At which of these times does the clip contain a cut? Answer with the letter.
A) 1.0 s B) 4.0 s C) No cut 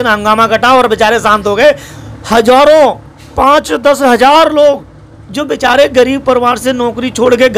C